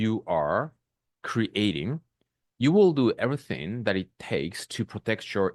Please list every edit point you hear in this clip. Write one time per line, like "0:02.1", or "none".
none